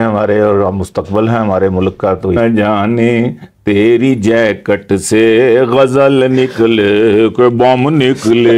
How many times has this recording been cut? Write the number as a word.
one